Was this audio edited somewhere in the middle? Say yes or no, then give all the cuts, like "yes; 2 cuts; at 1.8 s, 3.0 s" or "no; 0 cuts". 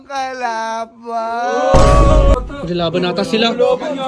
yes; 1 cut; at 2.4 s